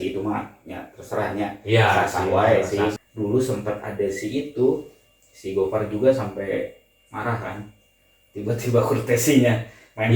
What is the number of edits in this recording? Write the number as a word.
one